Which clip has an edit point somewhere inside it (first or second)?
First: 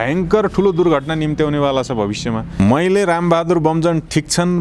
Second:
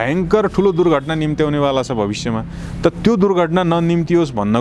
first